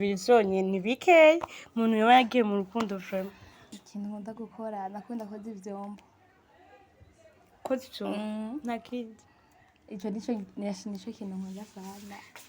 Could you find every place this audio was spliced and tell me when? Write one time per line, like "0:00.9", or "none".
0:03.8